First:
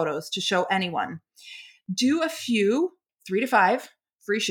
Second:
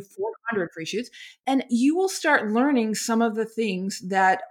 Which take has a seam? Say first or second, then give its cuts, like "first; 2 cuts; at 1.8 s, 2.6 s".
first; 1 cut; at 3.1 s